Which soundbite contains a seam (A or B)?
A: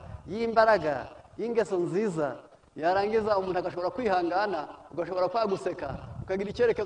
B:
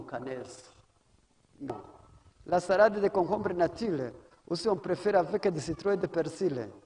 B